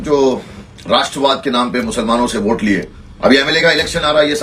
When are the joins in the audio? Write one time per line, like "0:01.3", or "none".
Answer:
0:03.0

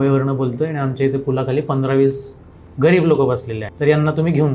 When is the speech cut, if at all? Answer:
0:03.6

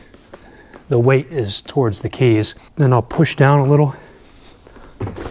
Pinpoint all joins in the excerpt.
0:02.6

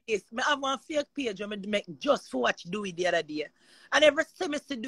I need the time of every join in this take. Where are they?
none

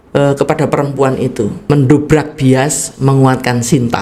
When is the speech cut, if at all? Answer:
0:01.6

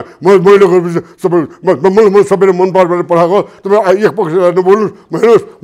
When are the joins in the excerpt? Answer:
none

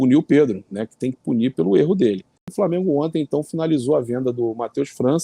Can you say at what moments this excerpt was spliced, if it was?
0:02.5

